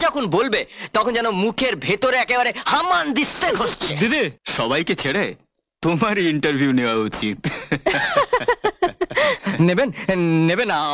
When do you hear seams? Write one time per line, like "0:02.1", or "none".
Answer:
0:04.4